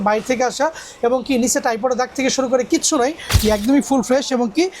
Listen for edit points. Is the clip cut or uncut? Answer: cut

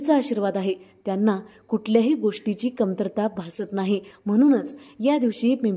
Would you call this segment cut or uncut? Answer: cut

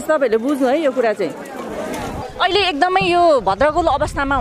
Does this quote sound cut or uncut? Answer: cut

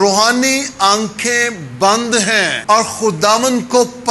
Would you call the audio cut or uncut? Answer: cut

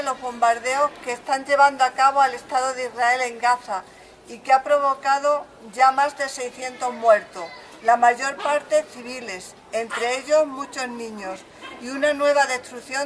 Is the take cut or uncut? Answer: uncut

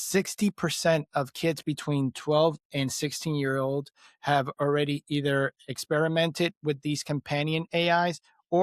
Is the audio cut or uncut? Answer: uncut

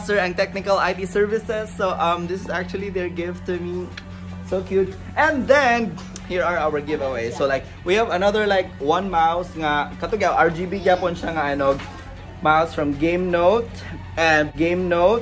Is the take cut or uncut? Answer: uncut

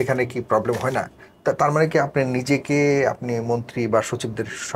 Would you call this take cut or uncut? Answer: uncut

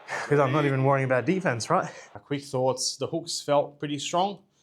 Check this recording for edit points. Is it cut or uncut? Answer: cut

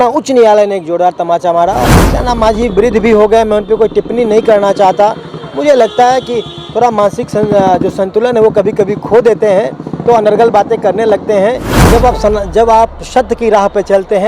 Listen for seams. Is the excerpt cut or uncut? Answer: cut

